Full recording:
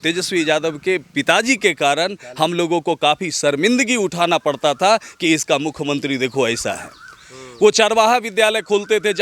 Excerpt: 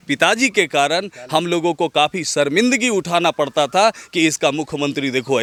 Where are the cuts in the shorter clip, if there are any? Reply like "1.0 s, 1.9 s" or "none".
none